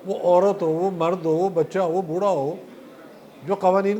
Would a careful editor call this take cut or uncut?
uncut